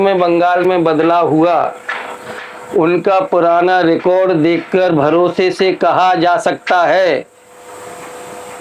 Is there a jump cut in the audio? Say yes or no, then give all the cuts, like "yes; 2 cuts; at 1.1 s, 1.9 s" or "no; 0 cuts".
no; 0 cuts